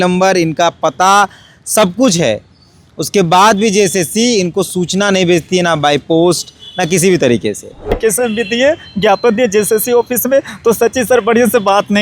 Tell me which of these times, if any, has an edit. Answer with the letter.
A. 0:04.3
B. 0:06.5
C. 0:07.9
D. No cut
C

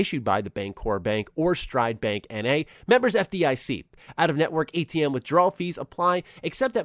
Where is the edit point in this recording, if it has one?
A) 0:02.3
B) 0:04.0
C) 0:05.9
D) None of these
D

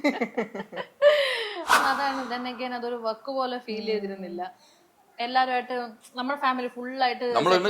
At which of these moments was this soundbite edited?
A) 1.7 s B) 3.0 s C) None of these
A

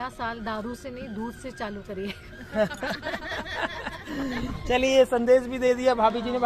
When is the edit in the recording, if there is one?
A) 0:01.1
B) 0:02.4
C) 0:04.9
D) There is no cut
D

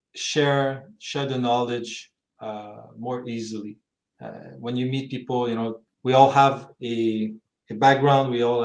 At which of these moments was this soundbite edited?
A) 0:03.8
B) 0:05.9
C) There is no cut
B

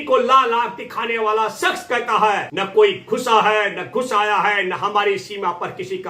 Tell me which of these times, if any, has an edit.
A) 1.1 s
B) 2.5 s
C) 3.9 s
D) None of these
B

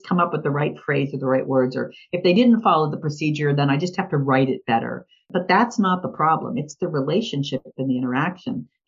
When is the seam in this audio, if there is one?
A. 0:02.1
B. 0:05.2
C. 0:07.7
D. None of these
B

